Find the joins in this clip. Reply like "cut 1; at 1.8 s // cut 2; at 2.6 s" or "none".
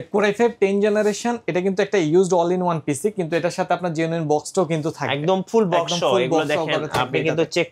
none